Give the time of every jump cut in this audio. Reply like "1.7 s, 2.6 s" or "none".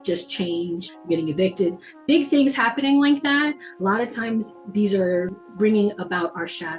5.4 s